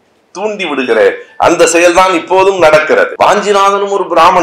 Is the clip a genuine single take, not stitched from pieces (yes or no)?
no